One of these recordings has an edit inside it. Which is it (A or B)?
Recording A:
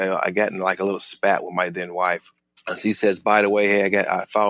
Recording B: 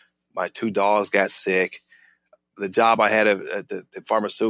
A